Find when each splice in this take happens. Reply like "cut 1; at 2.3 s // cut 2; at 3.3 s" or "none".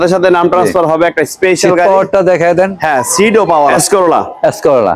cut 1; at 3.7 s